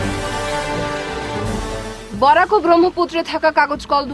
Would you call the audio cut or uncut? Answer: cut